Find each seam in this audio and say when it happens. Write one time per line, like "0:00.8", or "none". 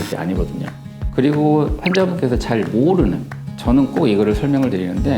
0:01.0